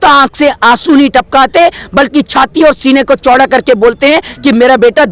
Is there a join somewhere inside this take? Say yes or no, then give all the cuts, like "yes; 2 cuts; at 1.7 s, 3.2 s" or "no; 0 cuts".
no; 0 cuts